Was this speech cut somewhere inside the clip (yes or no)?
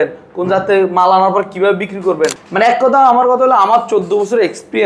yes